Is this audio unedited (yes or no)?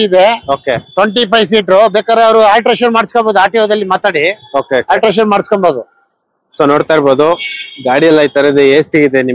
yes